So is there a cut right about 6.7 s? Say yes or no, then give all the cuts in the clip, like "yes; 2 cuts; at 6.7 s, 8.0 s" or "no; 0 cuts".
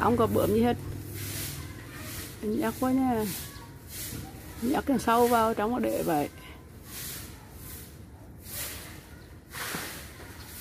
no; 0 cuts